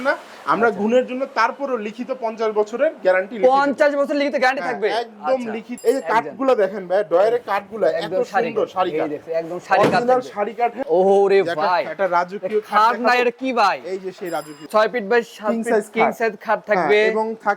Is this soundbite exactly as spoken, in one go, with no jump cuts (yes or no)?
no